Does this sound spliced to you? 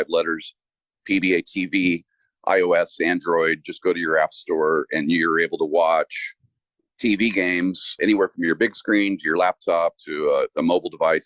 yes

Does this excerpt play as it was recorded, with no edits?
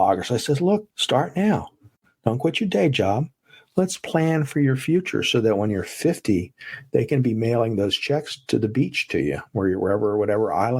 yes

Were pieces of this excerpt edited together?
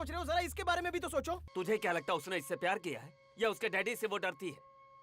yes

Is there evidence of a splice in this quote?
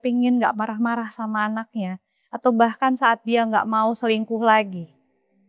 no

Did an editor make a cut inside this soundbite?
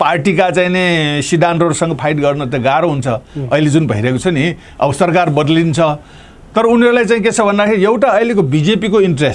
no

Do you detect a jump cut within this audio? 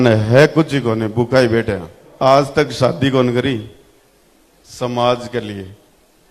yes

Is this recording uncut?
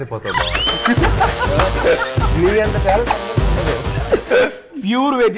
yes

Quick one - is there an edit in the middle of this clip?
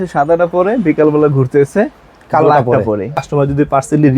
yes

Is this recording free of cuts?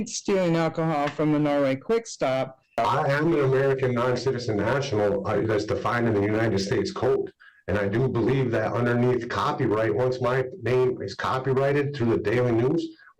no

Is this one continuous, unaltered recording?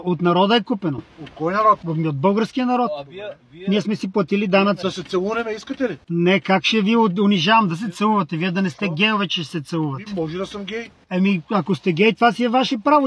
no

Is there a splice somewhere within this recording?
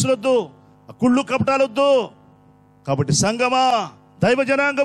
no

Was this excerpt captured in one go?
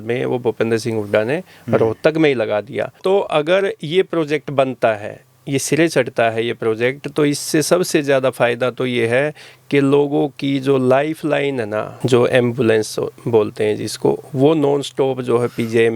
no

